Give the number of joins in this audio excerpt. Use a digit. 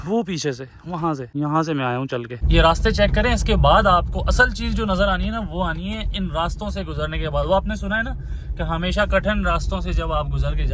2